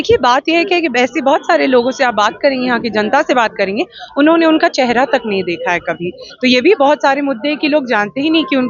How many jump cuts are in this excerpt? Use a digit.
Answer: 0